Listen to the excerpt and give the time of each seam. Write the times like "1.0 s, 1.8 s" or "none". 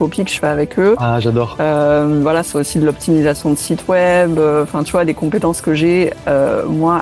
none